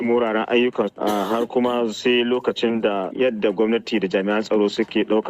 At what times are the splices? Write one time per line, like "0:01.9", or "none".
0:00.9
0:03.1